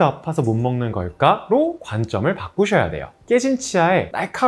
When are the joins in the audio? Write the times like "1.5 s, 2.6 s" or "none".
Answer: 3.1 s